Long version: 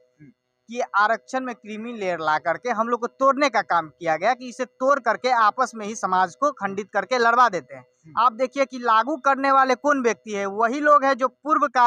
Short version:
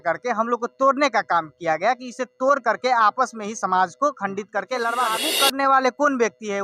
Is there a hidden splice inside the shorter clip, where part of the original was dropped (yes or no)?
yes